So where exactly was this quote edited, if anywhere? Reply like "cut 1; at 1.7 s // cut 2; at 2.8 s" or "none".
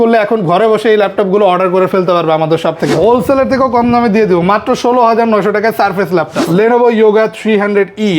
cut 1; at 2.9 s // cut 2; at 6.4 s